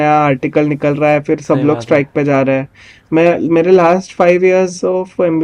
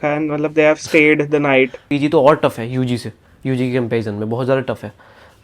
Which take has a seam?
second; 1 cut; at 1.8 s

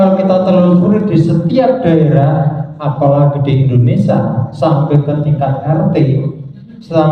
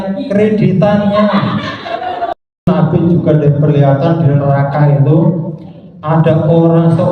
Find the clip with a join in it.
second; 1 cut; at 2.7 s

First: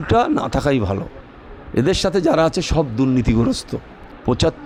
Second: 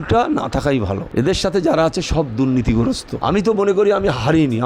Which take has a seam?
second; 2 cuts; at 1.0 s, 3.1 s

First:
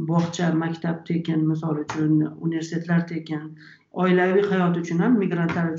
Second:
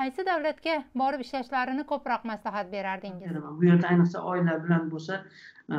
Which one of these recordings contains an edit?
second; 1 cut; at 3.5 s

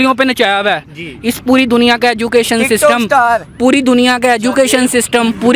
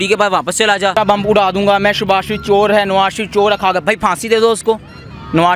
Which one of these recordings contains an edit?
second; 1 cut; at 1.0 s

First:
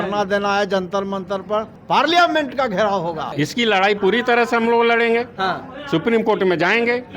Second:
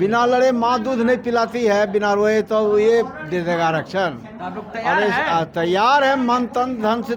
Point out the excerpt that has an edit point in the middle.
first; 2 cuts; at 1.8 s, 3.2 s

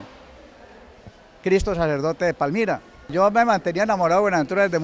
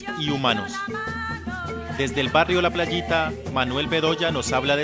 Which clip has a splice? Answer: second; 1 cut; at 1.9 s

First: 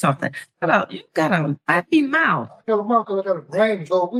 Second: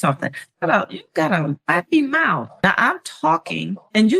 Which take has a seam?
second; 1 cut; at 2.5 s

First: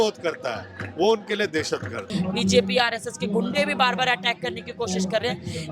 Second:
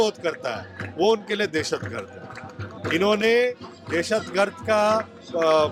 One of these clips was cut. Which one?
first; 1 cut; at 2.0 s

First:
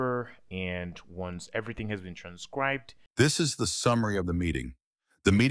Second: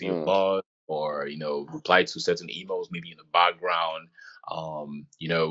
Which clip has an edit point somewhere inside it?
first; 1 cut; at 3.0 s

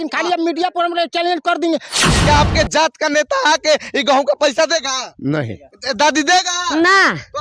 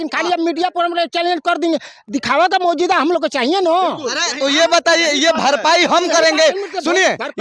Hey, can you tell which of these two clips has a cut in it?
first; 1 cut; at 2.1 s

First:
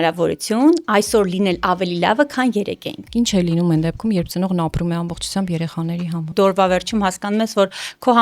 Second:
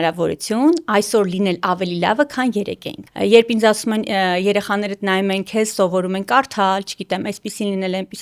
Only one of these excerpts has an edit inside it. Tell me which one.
first; 2 cuts; at 3.0 s, 6.3 s

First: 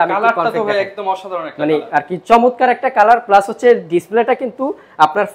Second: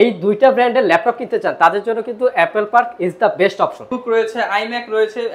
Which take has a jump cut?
second; 1 cut; at 3.9 s

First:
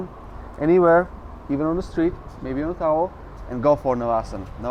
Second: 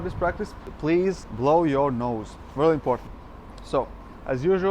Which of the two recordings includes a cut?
second; 1 cut; at 3.1 s

